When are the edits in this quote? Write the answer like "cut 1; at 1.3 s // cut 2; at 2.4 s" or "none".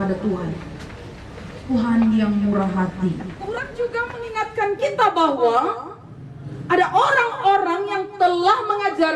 cut 1; at 3.7 s